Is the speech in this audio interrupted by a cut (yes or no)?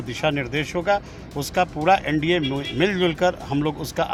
no